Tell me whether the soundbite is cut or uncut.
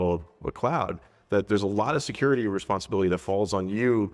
uncut